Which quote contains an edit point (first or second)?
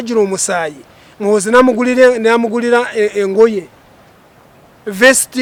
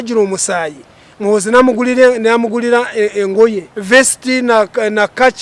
second